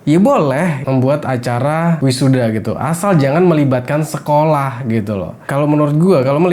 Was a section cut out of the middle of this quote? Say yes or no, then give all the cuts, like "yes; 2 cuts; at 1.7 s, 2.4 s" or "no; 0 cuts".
yes; 2 cuts; at 0.8 s, 2.0 s